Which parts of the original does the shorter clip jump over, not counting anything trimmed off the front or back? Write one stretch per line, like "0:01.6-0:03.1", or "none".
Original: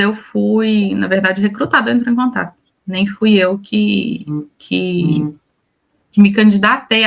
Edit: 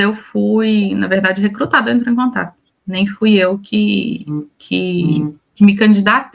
0:05.4-0:06.0